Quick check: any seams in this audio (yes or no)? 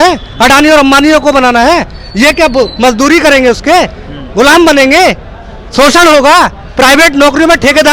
no